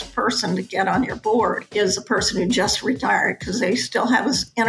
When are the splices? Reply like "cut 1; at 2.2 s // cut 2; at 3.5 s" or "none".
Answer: cut 1; at 1.6 s